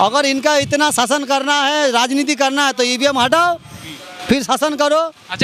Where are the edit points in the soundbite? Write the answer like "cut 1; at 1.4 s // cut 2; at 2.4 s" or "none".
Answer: none